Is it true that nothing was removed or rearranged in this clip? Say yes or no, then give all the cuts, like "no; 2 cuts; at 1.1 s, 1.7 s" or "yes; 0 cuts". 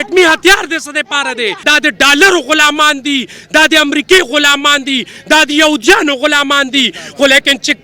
no; 1 cut; at 1.6 s